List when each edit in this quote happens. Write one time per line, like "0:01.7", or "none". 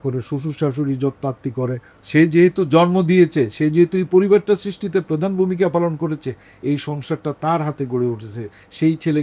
0:01.9